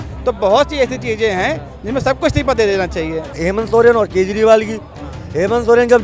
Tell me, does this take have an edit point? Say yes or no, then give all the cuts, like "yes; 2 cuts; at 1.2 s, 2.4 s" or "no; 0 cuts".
yes; 1 cut; at 3.4 s